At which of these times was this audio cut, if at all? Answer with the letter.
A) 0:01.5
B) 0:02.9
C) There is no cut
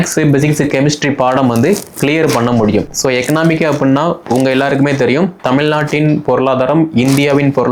B